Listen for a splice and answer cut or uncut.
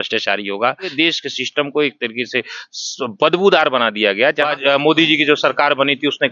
cut